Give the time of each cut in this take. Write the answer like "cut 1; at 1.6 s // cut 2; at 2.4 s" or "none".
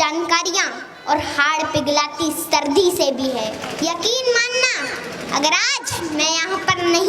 cut 1; at 3.6 s